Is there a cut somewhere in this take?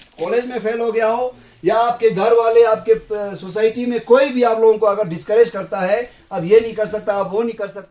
no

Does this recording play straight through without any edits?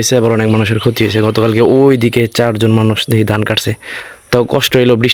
yes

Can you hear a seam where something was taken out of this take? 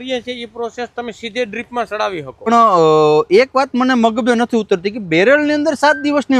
yes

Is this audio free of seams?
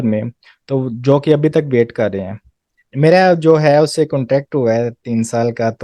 no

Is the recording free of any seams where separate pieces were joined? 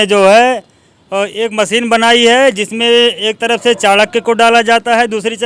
yes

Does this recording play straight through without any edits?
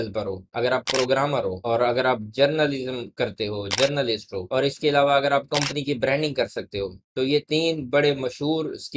yes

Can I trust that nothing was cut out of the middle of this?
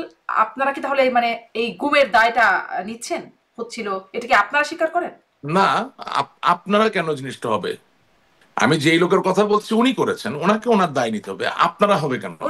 yes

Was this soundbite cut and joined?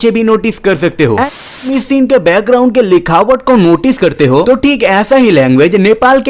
yes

